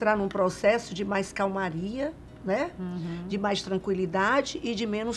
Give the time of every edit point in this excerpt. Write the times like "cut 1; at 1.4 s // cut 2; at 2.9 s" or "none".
none